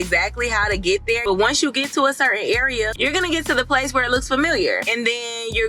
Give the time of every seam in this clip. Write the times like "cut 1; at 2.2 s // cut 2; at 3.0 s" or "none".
cut 1; at 1.2 s // cut 2; at 2.9 s